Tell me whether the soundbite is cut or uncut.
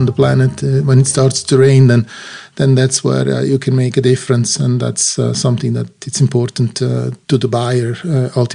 cut